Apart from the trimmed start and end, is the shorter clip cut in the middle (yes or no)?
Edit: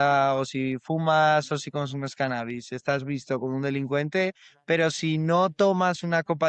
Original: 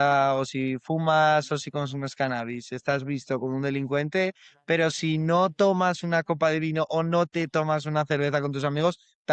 no